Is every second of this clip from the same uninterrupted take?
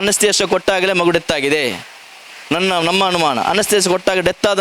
yes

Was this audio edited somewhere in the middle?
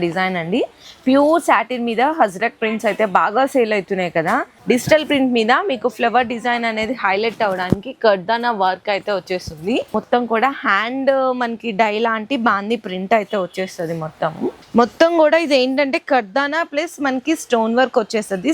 yes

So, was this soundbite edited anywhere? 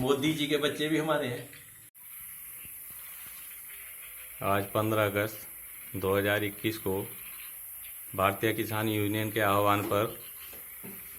yes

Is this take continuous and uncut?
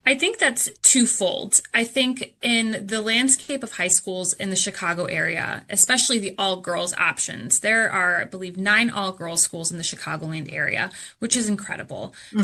yes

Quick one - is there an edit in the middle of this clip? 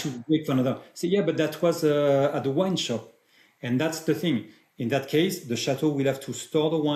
no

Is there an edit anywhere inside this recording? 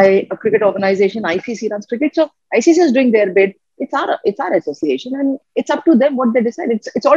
no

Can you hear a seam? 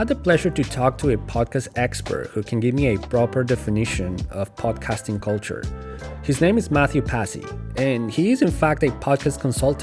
no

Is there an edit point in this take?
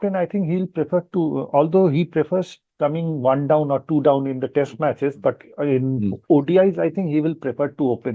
no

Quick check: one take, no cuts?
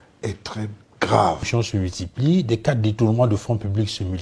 no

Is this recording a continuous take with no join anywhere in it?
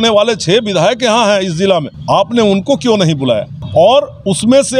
no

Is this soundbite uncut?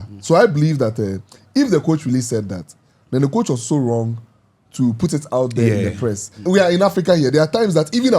no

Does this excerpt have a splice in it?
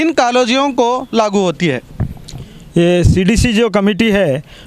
no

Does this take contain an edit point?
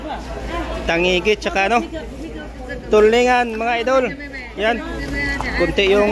yes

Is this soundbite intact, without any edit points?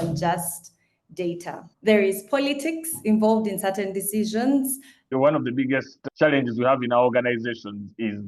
no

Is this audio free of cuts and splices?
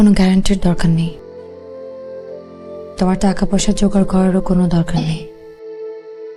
yes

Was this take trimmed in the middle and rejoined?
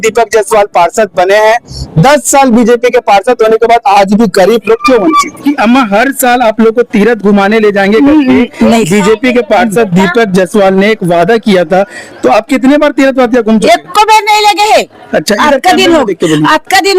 yes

